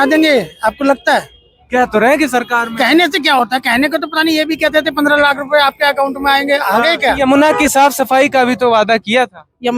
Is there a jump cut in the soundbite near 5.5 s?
no; 1 cut; at 7.2 s

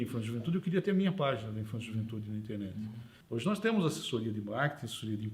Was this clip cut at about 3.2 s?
yes; 1 cut; at 3.2 s

